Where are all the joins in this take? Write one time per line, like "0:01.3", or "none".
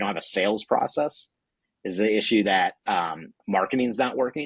none